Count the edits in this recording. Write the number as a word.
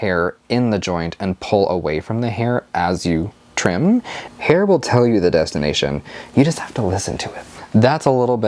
two